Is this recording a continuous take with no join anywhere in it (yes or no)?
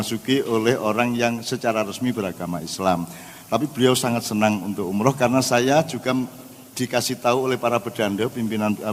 yes